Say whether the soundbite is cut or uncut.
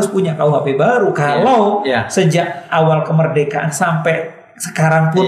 uncut